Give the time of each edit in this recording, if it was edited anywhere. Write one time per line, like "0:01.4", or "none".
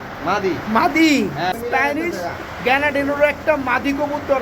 0:01.5